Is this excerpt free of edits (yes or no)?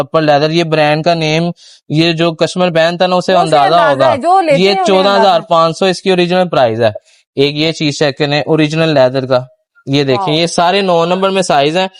yes